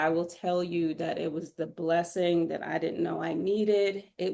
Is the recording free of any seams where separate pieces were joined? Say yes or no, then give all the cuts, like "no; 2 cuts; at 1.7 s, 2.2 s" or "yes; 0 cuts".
yes; 0 cuts